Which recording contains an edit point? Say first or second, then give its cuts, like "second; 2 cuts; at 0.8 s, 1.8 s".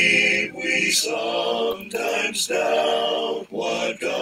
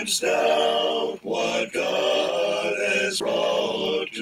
second; 1 cut; at 3.2 s